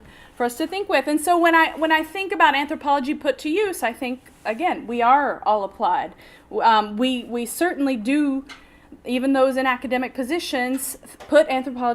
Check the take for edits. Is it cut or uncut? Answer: cut